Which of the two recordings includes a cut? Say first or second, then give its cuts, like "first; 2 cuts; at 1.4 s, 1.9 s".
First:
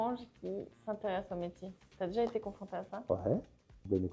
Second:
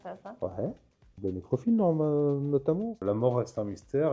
second; 1 cut; at 3.0 s